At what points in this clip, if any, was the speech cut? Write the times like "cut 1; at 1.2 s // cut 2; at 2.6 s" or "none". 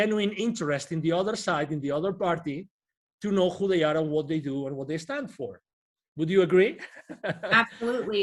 none